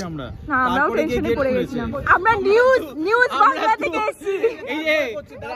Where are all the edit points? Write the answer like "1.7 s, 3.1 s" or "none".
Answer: 2.0 s